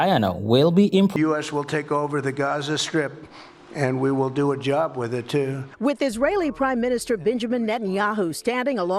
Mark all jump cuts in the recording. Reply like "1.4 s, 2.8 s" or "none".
1.2 s